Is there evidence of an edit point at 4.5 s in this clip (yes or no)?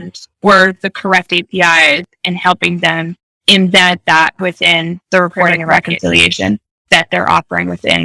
no